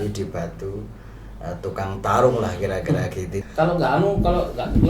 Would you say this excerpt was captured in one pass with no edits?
no; 1 cut; at 3.4 s

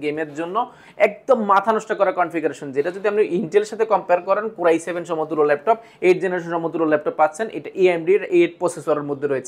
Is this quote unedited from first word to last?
yes; 0 cuts

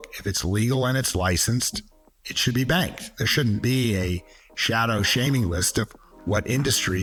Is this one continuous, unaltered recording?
yes; 0 cuts

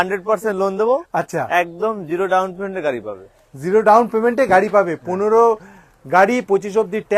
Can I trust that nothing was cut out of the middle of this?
yes; 0 cuts

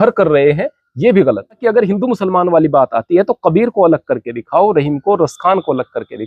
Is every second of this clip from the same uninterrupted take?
no; 1 cut; at 1.6 s

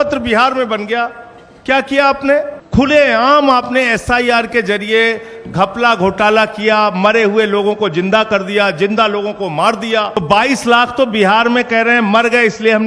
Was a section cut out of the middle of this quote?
yes; 2 cuts; at 2.6 s, 10.2 s

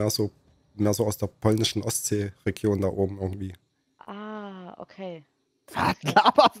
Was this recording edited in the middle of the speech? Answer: no; 0 cuts

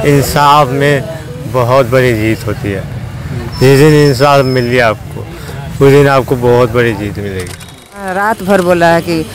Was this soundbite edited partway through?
yes; 1 cut; at 8.2 s

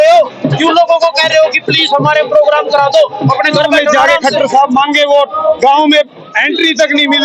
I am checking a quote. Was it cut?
yes; 1 cut; at 3.9 s

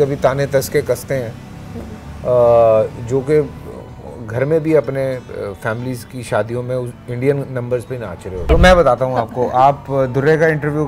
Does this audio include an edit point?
yes; 1 cut; at 8.6 s

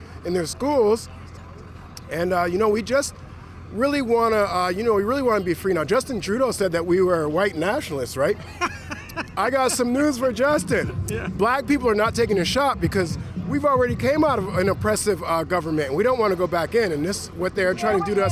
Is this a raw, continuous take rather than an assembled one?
yes; 0 cuts

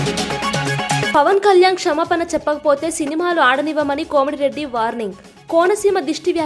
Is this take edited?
yes; 1 cut; at 1.1 s

